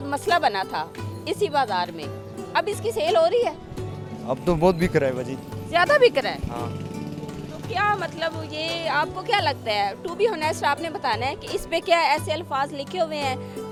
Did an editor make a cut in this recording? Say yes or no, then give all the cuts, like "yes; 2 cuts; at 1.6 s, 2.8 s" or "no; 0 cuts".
no; 0 cuts